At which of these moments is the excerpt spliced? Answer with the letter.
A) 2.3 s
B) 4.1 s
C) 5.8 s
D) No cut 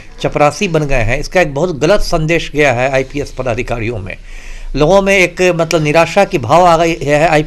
D